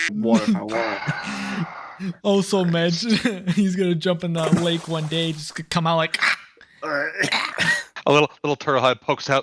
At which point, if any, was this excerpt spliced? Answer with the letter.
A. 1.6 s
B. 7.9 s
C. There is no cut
B